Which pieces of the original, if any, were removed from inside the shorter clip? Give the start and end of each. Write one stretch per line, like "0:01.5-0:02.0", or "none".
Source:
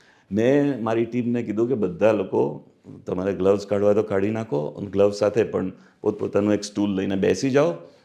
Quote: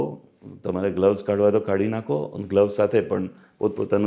none